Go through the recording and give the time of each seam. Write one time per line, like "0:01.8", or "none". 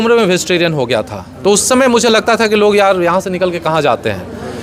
none